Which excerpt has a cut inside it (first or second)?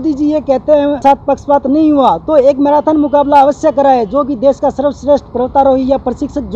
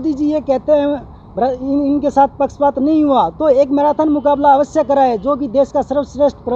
first